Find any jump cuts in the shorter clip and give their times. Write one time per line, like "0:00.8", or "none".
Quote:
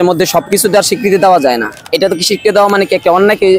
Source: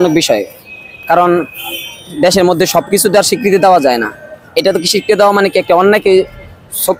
0:01.8